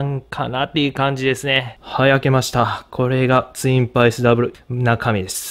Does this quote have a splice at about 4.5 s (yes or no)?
yes